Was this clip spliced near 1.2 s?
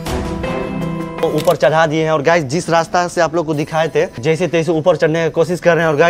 yes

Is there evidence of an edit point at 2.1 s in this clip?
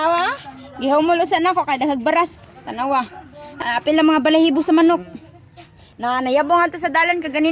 no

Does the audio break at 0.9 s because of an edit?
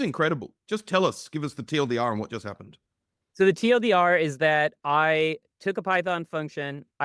no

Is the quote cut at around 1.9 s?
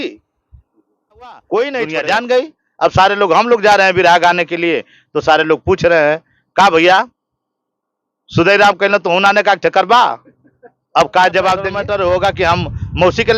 yes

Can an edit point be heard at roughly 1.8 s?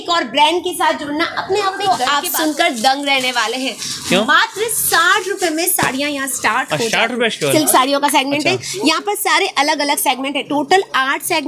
yes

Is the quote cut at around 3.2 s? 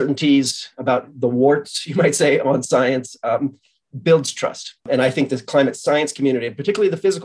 no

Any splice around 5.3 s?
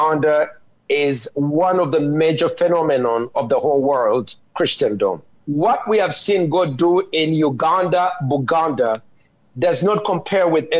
yes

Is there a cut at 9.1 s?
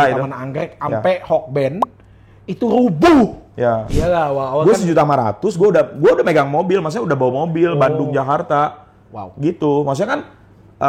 no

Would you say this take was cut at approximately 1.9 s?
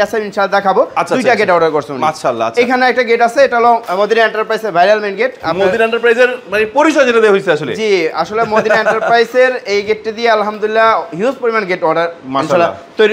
no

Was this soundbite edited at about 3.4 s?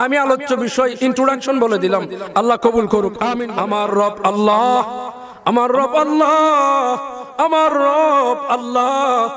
yes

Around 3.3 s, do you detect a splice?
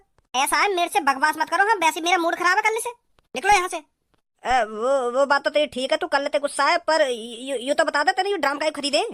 no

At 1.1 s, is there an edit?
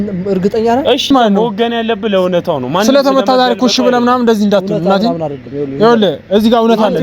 yes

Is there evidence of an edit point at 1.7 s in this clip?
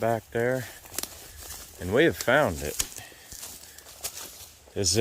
no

